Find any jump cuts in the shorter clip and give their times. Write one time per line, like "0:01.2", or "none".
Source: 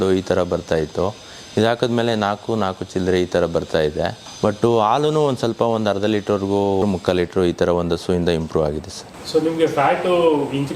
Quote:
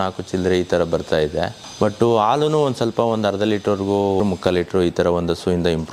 none